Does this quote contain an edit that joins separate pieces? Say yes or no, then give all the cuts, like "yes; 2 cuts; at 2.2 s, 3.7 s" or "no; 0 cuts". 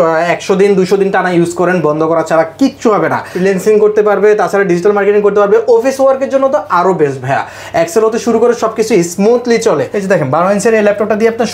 yes; 2 cuts; at 3.3 s, 9.9 s